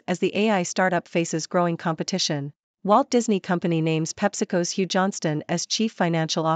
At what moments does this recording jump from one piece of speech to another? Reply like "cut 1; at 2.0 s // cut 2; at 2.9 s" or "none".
cut 1; at 2.8 s